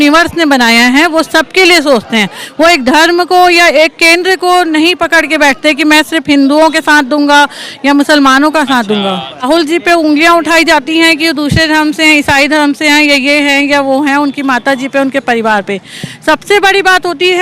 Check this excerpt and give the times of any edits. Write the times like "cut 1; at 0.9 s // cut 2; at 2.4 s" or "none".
cut 1; at 9.4 s